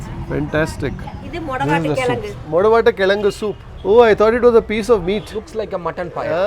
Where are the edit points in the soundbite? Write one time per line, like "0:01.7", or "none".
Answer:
0:01.2